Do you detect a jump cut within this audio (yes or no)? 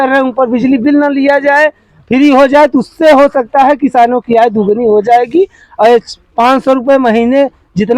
no